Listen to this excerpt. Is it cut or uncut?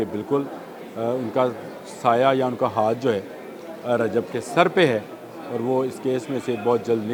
uncut